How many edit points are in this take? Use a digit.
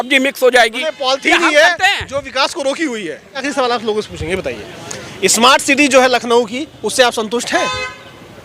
1